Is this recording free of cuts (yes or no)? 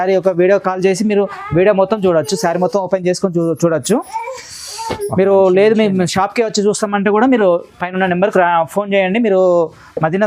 yes